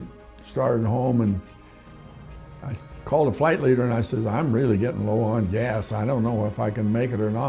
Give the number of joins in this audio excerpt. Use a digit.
0